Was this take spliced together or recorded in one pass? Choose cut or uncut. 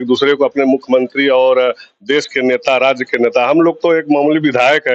uncut